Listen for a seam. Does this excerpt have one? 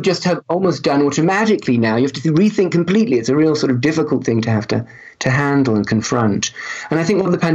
no; 0 cuts

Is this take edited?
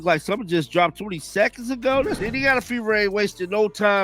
no; 0 cuts

